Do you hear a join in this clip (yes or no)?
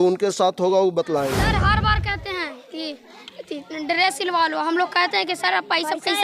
yes